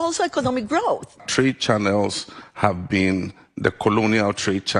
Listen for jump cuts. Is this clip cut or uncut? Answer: cut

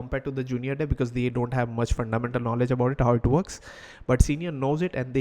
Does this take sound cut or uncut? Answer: uncut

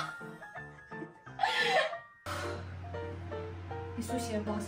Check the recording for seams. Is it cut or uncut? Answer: cut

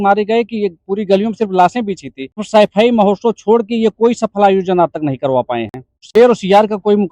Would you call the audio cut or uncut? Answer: cut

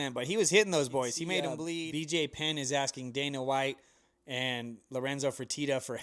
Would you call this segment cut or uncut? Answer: cut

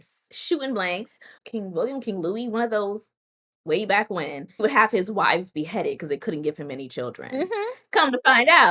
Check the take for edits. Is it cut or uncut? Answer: cut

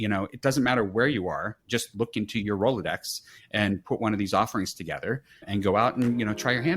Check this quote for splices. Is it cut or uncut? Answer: cut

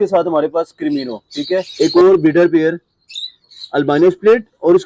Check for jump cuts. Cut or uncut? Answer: cut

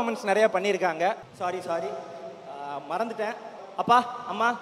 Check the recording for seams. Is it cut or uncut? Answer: cut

